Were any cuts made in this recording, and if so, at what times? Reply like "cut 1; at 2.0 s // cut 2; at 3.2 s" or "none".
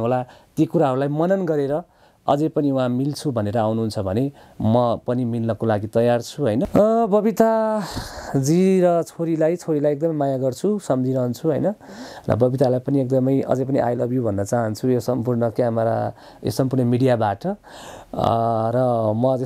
cut 1; at 6.7 s